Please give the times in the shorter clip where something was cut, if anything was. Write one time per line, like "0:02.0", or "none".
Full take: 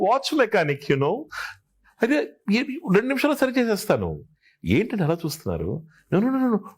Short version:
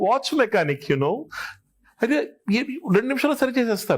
none